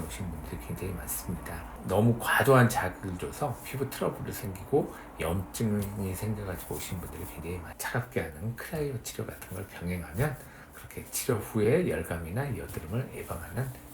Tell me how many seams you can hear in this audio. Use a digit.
2